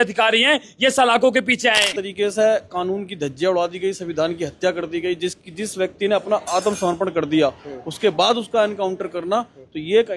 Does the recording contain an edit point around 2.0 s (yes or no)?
yes